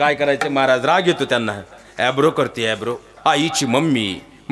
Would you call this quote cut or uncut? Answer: cut